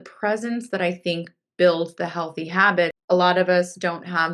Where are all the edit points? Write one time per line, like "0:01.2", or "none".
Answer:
0:03.0